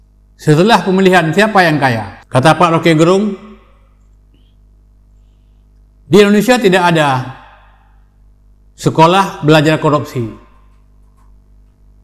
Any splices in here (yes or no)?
yes